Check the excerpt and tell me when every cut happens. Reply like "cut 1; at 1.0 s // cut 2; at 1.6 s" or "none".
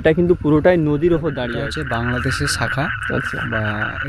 cut 1; at 1.5 s